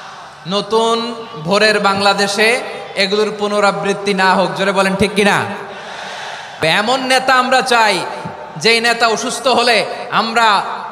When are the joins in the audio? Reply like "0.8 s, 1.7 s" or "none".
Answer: 6.6 s